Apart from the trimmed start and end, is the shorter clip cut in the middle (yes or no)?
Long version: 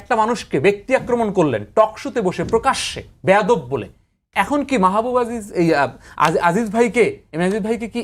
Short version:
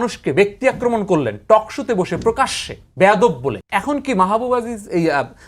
yes